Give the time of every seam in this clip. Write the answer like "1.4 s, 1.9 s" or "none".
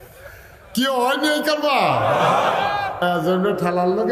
3.0 s